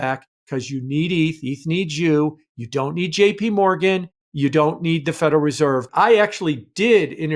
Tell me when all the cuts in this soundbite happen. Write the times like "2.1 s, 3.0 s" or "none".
4.2 s, 5.8 s